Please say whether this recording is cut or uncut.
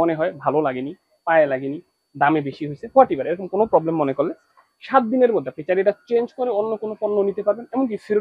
uncut